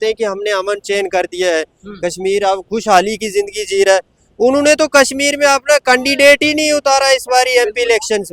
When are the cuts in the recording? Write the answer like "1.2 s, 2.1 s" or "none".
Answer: none